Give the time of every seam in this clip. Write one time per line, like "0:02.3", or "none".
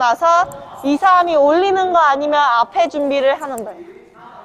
none

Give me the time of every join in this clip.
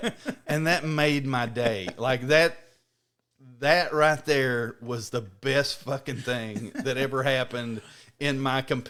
none

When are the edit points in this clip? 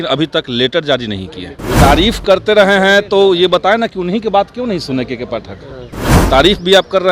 0:01.8

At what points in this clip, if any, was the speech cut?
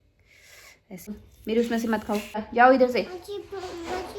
0:01.1
0:02.5

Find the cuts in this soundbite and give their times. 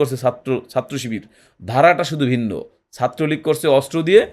none

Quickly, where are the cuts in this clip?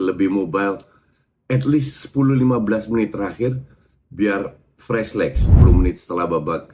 0:05.5

